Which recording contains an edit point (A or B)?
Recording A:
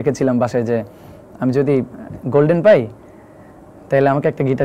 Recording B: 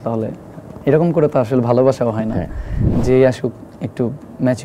B